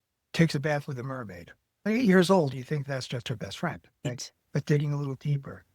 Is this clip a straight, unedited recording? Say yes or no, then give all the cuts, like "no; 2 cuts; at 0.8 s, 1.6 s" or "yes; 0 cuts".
yes; 0 cuts